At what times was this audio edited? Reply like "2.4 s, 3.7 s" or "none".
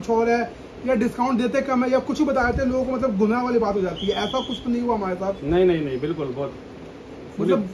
none